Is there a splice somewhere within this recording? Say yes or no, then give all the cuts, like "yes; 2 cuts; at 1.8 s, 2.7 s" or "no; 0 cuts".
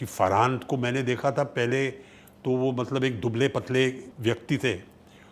yes; 1 cut; at 4.1 s